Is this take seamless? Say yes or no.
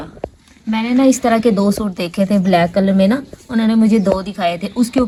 yes